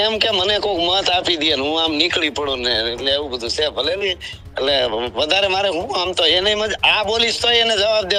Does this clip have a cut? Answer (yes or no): no